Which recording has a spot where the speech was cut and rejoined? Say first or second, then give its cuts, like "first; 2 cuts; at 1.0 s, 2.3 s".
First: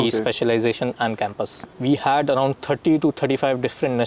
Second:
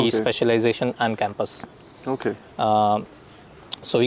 first; 1 cut; at 1.7 s